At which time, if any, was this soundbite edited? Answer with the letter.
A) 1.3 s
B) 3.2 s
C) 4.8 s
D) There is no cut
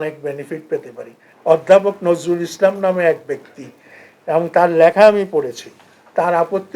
A